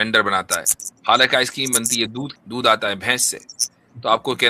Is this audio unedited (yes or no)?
no